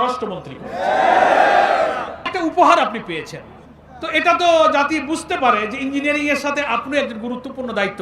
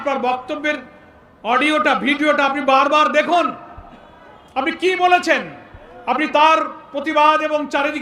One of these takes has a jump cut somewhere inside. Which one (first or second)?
first